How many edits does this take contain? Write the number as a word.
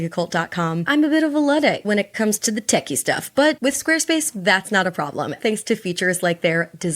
two